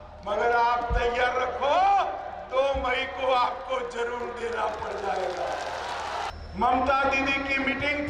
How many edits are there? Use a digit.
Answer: 1